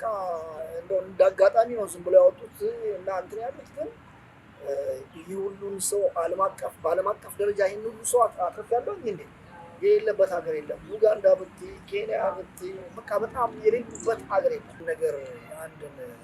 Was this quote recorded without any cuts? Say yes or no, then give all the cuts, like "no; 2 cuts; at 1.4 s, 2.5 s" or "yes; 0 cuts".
no; 1 cut; at 14.7 s